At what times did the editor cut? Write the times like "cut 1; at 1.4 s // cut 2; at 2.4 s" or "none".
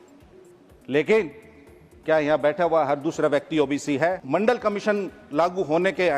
cut 1; at 4.2 s